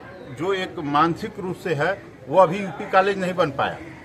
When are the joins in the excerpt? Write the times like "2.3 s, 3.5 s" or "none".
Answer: none